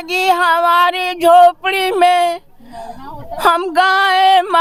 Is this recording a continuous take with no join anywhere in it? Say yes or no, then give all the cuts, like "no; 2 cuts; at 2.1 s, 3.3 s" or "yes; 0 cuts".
yes; 0 cuts